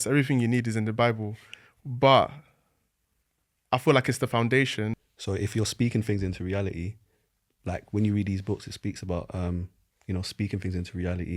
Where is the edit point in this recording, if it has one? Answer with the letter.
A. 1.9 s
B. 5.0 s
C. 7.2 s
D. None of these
B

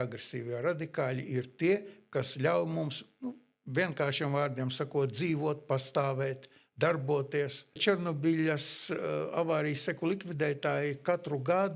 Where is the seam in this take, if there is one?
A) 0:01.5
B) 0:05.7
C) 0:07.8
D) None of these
C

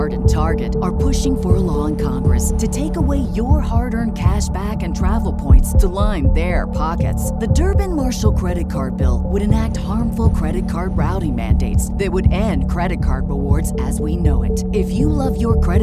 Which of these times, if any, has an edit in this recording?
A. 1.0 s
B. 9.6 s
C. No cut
C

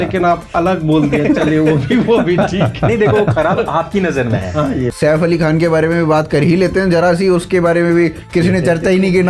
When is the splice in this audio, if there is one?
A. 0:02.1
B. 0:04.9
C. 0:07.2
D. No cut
B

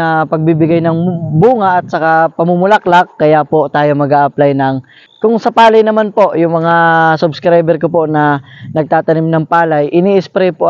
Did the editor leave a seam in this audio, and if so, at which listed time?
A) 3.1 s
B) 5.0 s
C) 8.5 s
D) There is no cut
B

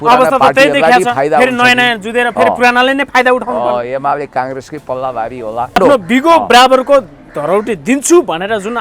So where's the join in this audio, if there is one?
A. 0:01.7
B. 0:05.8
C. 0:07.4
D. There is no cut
B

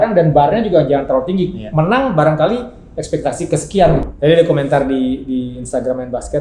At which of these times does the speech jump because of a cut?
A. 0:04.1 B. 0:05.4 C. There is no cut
A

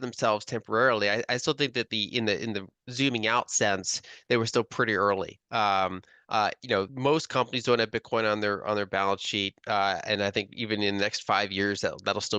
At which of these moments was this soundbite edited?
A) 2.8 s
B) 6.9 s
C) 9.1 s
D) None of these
B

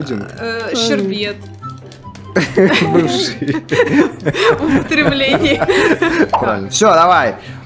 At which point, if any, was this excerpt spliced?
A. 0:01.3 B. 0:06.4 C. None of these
B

